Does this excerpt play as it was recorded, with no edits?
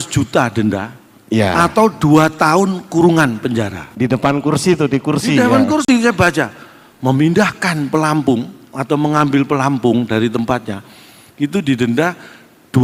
yes; 0 cuts

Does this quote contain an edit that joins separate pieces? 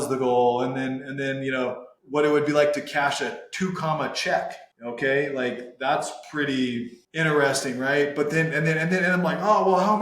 yes; 3 cuts; at 1.9 s, 4.7 s, 7.0 s

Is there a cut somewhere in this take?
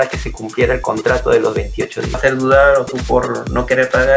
yes; 1 cut; at 2.2 s

